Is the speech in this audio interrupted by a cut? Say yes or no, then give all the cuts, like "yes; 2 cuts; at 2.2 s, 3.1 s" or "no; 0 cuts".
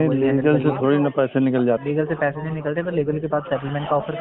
yes; 1 cut; at 1.8 s